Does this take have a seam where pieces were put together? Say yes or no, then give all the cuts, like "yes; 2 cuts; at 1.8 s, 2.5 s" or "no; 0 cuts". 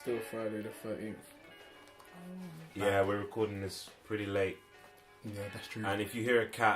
yes; 1 cut; at 2.6 s